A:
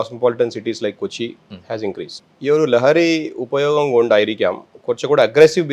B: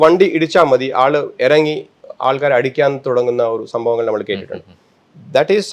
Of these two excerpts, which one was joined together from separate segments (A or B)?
A